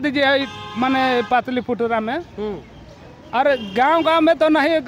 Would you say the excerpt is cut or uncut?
uncut